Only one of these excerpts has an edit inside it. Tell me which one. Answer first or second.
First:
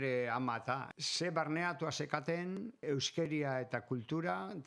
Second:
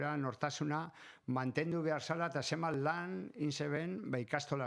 first